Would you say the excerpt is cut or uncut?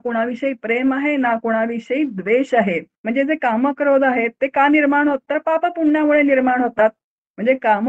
cut